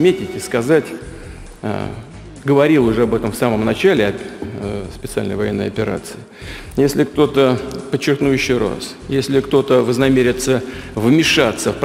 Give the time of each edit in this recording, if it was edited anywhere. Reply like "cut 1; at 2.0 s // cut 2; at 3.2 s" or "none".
none